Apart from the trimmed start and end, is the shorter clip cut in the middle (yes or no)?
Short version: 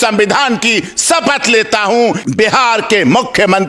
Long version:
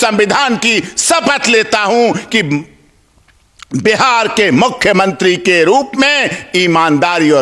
yes